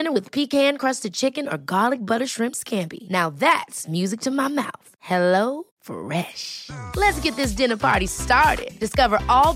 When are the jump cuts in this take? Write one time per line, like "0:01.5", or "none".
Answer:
none